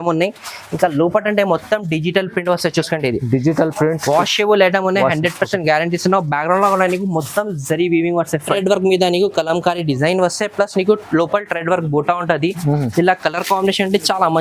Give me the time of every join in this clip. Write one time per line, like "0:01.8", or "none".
0:08.6

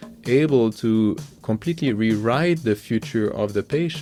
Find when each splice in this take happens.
none

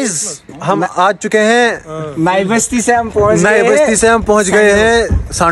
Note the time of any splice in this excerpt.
none

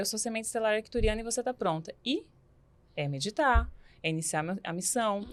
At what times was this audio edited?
none

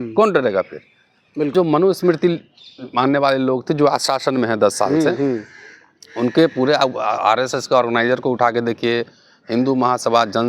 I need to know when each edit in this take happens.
0:01.5

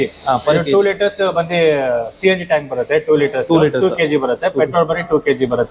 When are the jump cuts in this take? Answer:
none

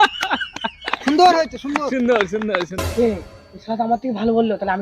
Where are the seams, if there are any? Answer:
0:02.8

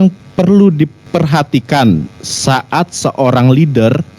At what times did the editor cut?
0:01.0

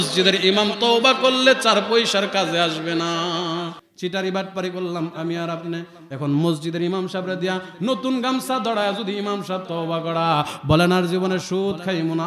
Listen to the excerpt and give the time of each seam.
0:03.8

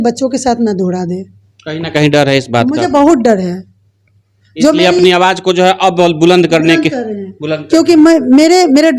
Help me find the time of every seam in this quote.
none

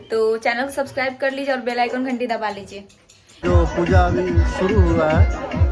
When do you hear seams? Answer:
0:03.4

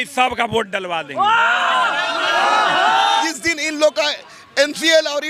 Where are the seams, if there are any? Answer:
0:03.2

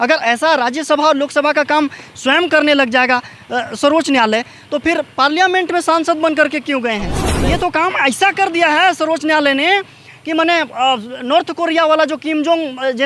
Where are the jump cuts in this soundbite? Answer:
0:07.4

